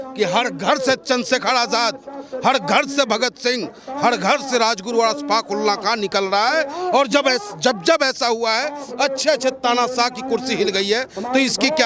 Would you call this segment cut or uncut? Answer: uncut